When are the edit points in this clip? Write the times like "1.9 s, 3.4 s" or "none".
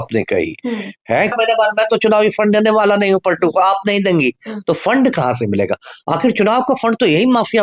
1.3 s